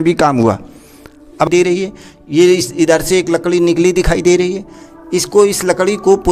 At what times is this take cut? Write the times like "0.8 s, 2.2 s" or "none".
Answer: 1.5 s